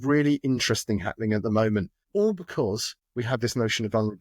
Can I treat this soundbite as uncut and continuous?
no; 2 cuts; at 2.0 s, 3.0 s

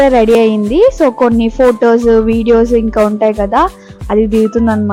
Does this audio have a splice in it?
no; 0 cuts

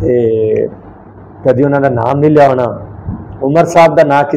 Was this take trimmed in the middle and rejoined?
no; 0 cuts

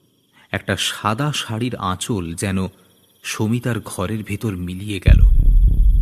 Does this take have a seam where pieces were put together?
yes; 1 cut; at 5.0 s

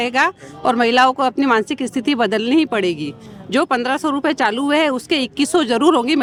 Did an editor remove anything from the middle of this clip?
no; 0 cuts

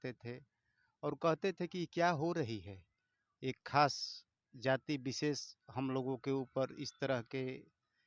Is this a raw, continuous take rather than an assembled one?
yes; 0 cuts

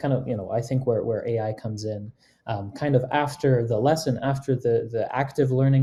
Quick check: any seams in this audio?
no; 0 cuts

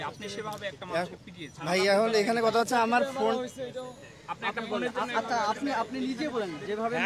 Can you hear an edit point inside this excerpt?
no; 0 cuts

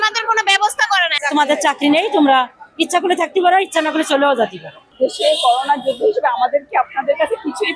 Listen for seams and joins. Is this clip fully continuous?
no; 2 cuts; at 1.2 s, 4.8 s

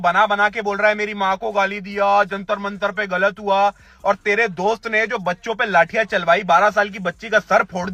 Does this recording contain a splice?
no; 0 cuts

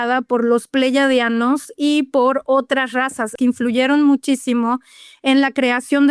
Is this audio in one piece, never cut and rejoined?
no; 1 cut; at 3.3 s

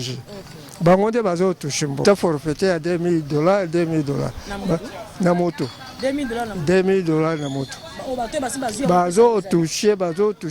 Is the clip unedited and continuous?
no; 1 cut; at 2.0 s

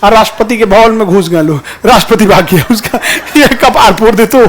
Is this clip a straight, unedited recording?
yes; 0 cuts

